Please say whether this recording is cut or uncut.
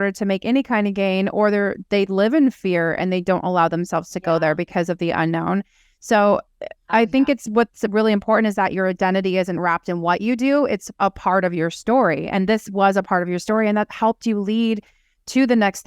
uncut